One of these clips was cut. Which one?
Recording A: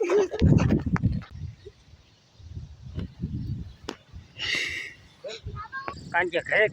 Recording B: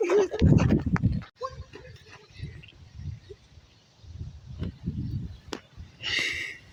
A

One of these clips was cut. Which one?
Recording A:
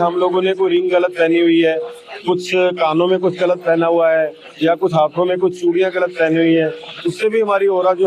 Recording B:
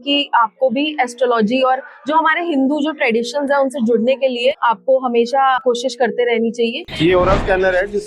B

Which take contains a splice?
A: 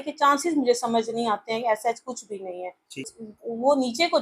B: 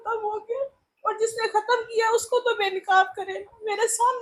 A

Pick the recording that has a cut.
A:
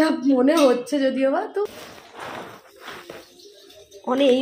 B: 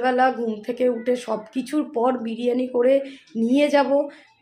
A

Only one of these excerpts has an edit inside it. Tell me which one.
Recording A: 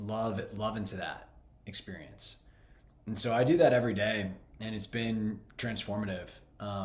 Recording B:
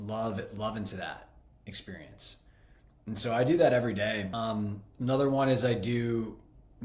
B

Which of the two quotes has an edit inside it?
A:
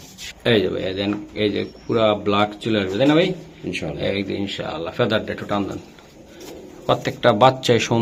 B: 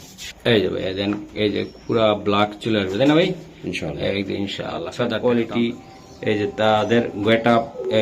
B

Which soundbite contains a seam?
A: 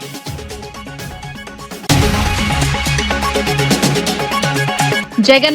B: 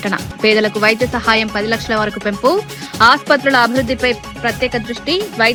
A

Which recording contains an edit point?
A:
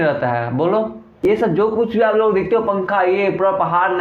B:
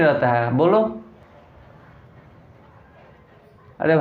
A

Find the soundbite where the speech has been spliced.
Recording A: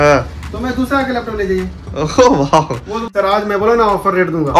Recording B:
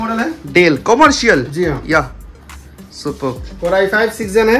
A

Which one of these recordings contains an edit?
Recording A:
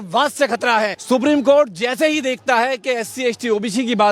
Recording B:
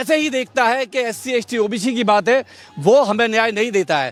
A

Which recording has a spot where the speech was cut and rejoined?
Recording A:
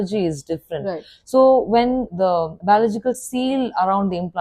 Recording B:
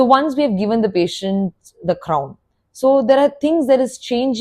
A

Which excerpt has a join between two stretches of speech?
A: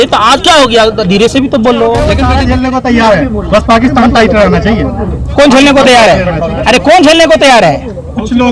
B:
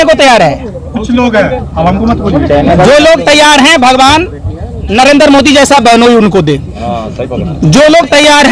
A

